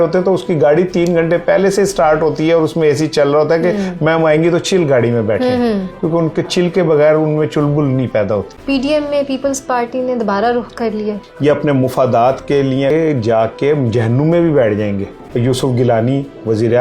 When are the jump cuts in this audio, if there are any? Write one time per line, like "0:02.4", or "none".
0:08.5
0:11.3
0:12.9
0:15.2